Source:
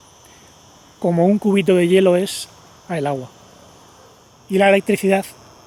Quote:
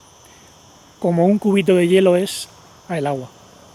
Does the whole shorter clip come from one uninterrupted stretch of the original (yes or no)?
yes